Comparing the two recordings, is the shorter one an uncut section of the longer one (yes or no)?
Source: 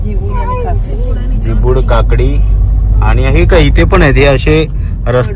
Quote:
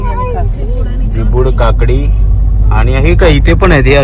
yes